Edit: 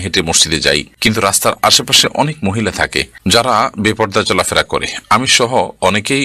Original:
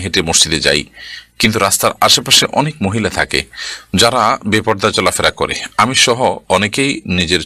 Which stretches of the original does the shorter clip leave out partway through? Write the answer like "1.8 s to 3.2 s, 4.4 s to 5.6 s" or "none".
0.9 s to 1.3 s, 3.4 s to 3.7 s